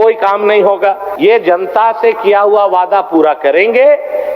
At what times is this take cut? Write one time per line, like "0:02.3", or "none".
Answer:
0:01.1